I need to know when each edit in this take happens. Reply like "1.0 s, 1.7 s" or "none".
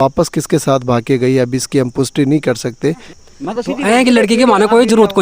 3.2 s